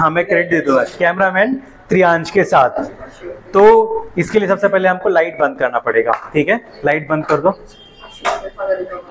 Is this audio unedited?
yes; 0 cuts

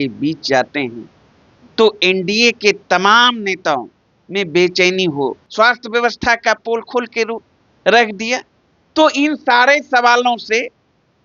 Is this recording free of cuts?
no; 1 cut; at 5.4 s

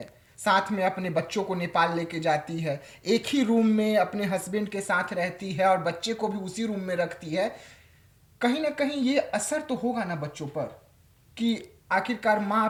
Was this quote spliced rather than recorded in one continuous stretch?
no; 0 cuts

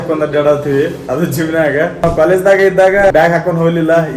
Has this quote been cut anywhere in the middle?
yes; 2 cuts; at 2.0 s, 3.1 s

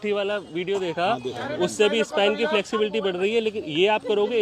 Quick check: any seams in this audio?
no; 0 cuts

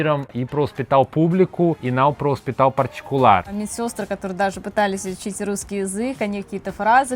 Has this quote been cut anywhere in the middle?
yes; 2 cuts; at 1.8 s, 3.6 s

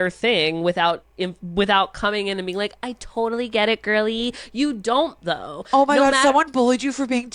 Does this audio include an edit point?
yes; 1 cut; at 4.4 s

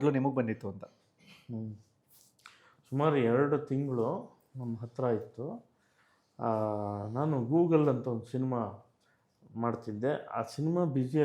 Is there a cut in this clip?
no; 0 cuts

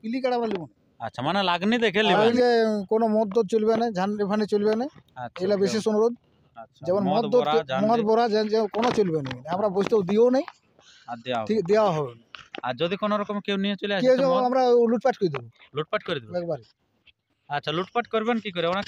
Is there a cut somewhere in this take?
yes; 1 cut; at 2.1 s

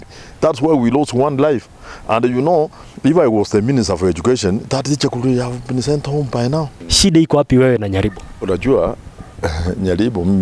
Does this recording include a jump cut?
yes; 2 cuts; at 2.8 s, 6.8 s

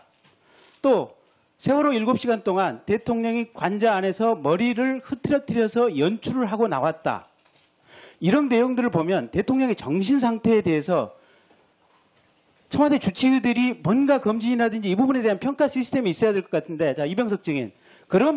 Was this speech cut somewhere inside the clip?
no; 0 cuts

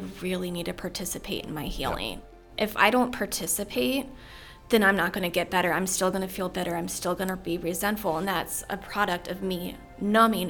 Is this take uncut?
no; 1 cut; at 2.5 s

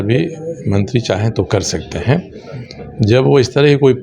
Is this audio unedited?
yes; 0 cuts

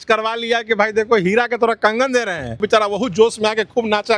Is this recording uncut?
no; 1 cut; at 2.6 s

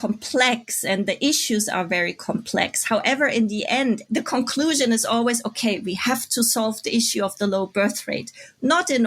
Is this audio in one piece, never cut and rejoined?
yes; 0 cuts

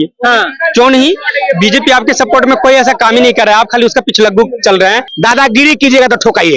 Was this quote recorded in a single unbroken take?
no; 1 cut; at 5.0 s

